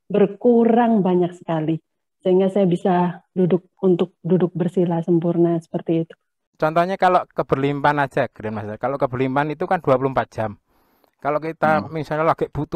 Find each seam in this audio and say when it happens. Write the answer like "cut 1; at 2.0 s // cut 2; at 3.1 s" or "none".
cut 1; at 6.5 s